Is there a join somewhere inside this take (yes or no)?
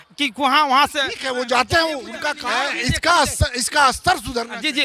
yes